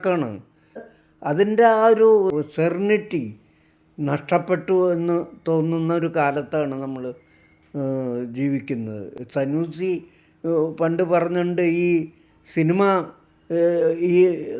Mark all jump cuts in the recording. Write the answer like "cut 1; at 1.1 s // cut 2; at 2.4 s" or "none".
cut 1; at 0.9 s // cut 2; at 2.3 s